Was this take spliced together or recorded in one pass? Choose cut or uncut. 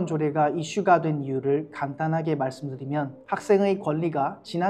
cut